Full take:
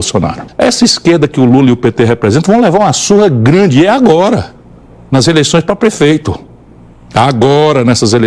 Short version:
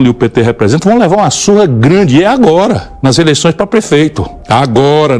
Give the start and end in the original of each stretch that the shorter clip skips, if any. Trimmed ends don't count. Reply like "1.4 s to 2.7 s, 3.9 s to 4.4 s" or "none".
4.5 s to 5.0 s, 6.4 s to 7.0 s